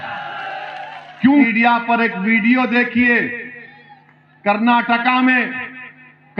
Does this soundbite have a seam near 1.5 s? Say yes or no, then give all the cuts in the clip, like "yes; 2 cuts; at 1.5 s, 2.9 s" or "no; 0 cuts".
yes; 1 cut; at 1.5 s